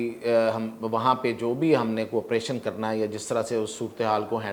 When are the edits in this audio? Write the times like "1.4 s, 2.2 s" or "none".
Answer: none